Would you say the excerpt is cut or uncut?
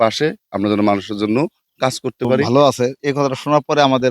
cut